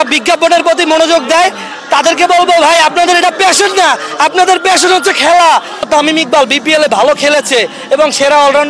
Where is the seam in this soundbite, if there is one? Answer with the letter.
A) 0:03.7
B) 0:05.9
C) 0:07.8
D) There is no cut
B